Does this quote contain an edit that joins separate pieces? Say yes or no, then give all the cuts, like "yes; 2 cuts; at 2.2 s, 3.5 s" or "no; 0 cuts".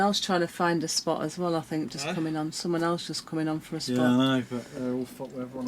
no; 0 cuts